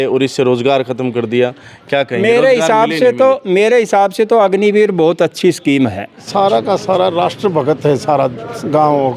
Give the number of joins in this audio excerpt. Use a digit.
1